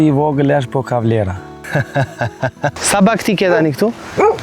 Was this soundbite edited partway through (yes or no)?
yes